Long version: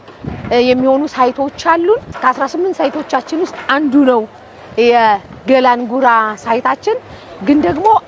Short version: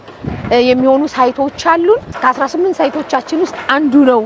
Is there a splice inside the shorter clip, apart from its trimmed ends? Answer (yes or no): no